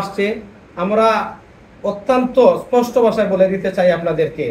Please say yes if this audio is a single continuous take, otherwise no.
yes